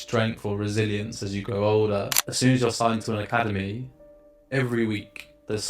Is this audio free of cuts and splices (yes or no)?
no